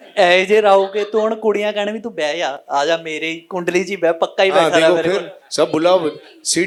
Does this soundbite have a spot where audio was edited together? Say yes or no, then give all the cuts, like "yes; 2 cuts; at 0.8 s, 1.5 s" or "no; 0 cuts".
no; 0 cuts